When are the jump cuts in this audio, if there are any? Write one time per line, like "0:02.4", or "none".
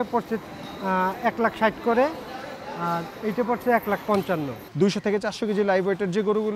0:04.6